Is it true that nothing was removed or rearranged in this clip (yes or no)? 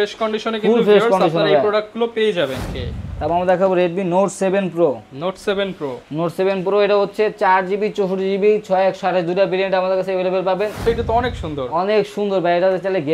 no